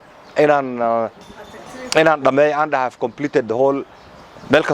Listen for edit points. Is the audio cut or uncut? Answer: uncut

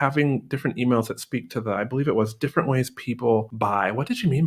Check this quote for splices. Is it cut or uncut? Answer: cut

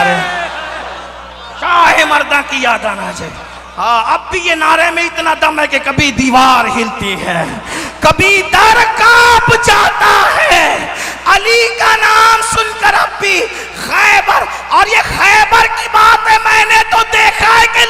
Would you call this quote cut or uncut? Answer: uncut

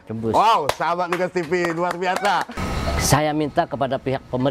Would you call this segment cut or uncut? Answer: cut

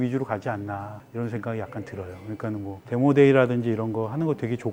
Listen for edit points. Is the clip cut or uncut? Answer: uncut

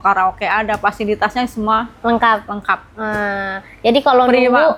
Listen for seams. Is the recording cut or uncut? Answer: uncut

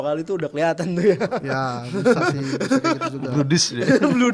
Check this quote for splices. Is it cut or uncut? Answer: uncut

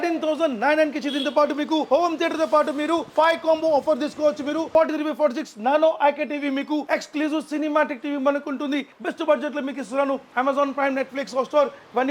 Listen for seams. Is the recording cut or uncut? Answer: cut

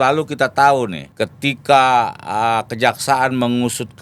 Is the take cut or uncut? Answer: cut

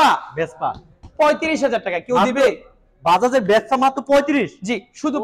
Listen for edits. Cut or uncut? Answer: uncut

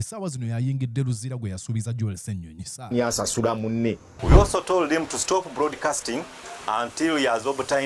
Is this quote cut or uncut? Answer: cut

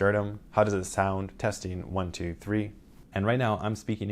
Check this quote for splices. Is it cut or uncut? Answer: cut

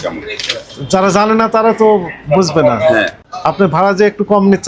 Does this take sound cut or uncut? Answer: uncut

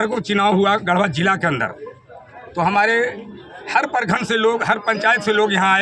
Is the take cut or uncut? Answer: uncut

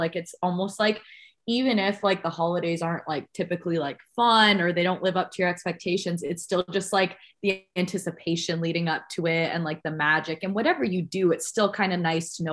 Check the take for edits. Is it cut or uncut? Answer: uncut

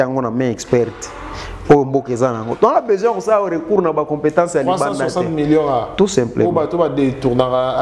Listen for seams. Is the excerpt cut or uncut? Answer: uncut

